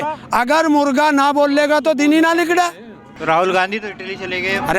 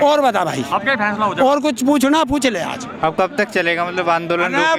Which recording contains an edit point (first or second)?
first